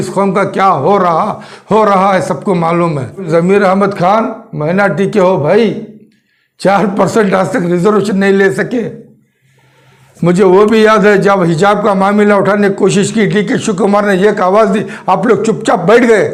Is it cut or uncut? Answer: uncut